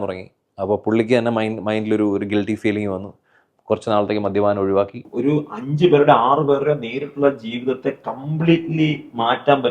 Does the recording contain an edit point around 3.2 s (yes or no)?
no